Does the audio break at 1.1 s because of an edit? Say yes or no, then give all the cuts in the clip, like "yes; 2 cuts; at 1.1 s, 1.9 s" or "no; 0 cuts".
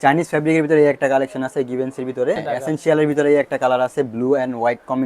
no; 1 cut; at 2.4 s